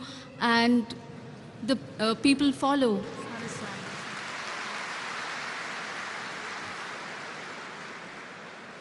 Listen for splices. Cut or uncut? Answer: cut